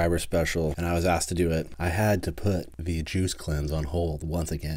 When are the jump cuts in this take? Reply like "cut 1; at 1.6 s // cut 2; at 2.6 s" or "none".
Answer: cut 1; at 0.8 s // cut 2; at 1.7 s // cut 3; at 2.7 s